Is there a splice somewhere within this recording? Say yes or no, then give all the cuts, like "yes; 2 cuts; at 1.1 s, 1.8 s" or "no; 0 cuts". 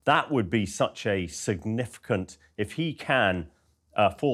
no; 0 cuts